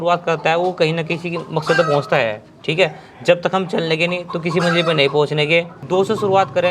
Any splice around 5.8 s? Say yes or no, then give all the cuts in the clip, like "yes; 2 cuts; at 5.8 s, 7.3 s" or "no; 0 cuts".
yes; 1 cut; at 5.8 s